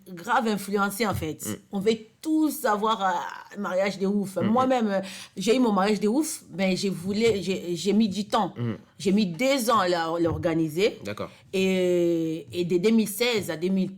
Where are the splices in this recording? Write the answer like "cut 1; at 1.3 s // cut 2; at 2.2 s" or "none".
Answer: none